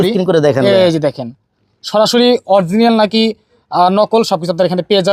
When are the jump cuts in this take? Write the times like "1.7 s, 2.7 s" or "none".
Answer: none